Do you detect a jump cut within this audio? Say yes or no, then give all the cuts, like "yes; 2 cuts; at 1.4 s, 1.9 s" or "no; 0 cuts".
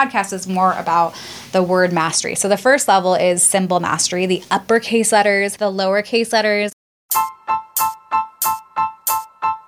yes; 2 cuts; at 5.5 s, 6.8 s